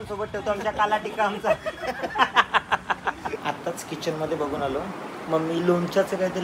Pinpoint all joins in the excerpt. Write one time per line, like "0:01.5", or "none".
0:03.4